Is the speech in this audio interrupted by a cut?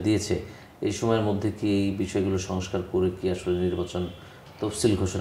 no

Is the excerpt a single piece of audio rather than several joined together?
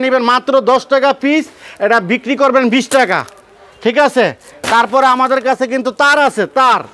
yes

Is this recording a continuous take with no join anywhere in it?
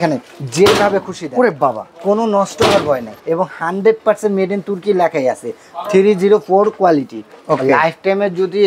no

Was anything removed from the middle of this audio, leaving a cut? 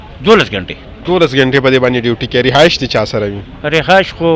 no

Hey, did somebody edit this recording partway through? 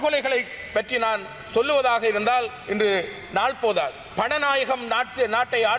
yes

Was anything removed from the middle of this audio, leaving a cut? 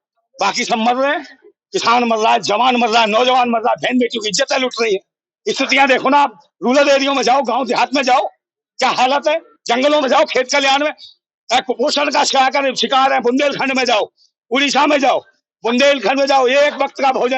no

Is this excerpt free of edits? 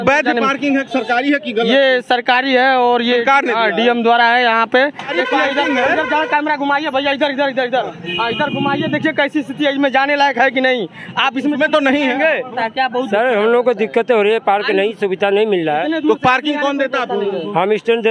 no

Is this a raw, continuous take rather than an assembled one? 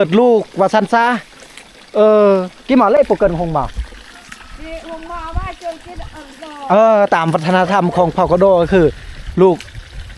yes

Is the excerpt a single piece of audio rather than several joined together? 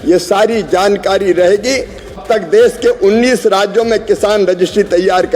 no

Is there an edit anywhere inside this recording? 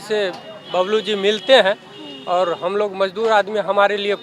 no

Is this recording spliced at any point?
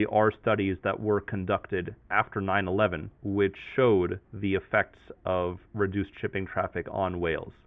yes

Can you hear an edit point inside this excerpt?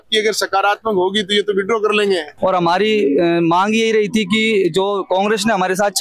yes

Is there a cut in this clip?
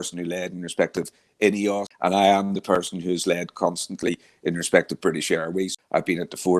yes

